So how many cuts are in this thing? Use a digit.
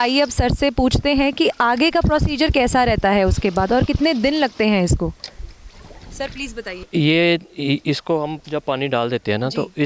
1